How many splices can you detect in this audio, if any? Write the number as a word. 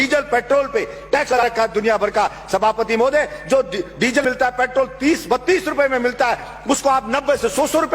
two